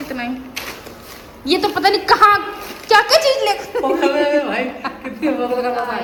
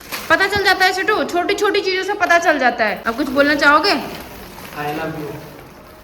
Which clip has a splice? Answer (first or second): second